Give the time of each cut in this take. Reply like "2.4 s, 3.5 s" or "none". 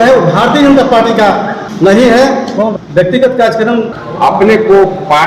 1.6 s, 2.7 s, 4.0 s